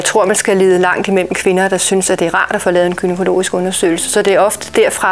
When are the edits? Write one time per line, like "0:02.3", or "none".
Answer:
none